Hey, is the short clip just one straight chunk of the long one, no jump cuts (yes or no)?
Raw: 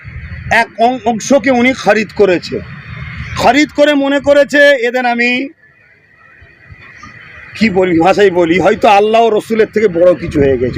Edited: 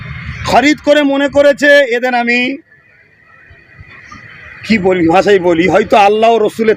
yes